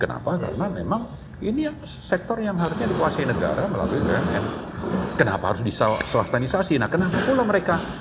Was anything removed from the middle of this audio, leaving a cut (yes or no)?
no